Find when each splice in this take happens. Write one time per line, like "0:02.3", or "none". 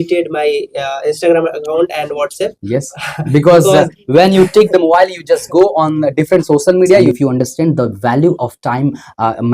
0:07.1